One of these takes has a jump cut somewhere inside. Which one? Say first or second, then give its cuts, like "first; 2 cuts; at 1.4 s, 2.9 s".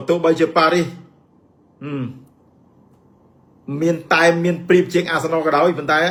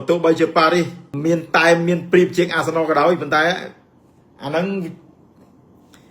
second; 1 cut; at 1.0 s